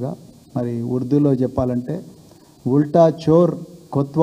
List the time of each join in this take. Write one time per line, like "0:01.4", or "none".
0:01.5